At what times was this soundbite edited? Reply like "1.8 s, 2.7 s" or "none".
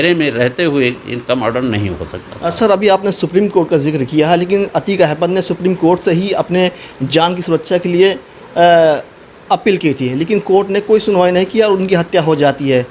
none